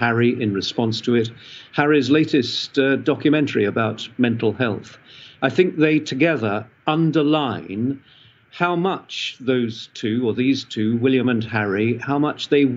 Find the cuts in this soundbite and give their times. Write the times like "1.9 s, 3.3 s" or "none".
none